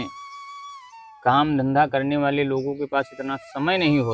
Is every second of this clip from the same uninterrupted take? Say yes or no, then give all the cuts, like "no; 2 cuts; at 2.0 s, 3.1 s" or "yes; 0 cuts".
yes; 0 cuts